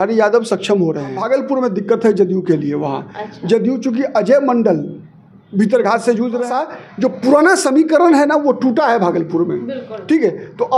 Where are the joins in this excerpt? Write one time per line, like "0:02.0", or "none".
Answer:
0:01.2
0:06.5